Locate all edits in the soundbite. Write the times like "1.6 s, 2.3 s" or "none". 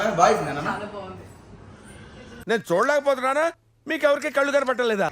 none